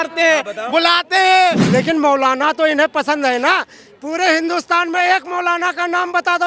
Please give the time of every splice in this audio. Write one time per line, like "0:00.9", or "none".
0:01.6